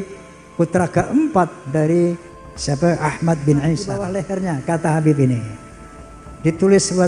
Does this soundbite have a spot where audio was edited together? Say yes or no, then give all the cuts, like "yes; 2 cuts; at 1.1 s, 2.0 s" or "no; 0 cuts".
yes; 1 cut; at 4.0 s